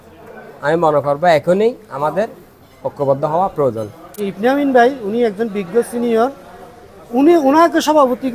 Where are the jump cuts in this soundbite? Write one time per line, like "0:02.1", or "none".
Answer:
0:04.1

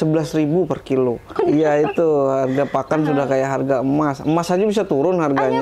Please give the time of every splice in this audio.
0:01.3

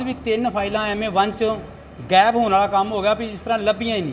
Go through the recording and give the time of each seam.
none

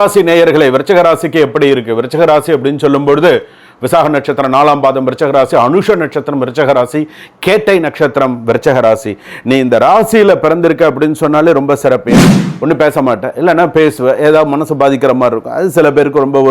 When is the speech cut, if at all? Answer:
0:12.2

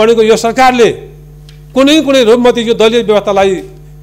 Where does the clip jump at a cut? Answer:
none

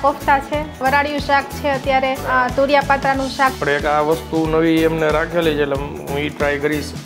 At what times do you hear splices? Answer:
0:00.8
0:02.2
0:03.6

